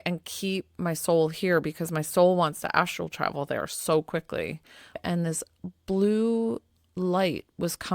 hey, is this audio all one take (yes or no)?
no